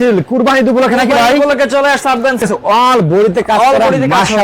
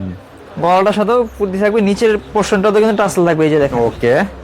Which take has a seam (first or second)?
first